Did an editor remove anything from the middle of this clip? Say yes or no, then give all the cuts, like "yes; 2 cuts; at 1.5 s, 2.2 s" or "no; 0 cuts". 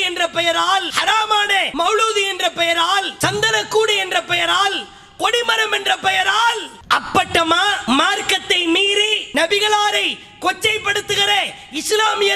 yes; 5 cuts; at 1.4 s, 3.1 s, 6.7 s, 7.8 s, 9.2 s